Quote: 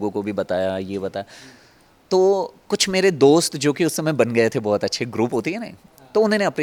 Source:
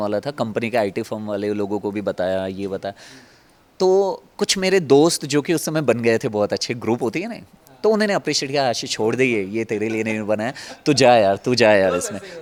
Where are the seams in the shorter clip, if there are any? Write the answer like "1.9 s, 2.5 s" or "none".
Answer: none